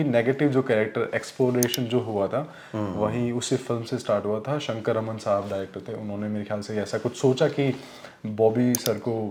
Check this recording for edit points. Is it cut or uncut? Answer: uncut